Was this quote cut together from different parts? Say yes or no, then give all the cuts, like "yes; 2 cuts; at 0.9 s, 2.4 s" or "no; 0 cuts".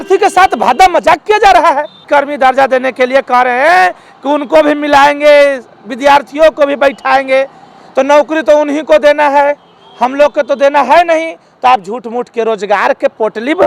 yes; 1 cut; at 2.0 s